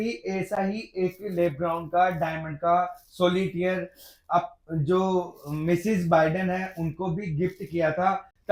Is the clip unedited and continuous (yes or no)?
yes